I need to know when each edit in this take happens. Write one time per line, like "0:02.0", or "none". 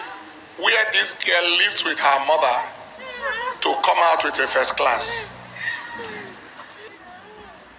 0:06.9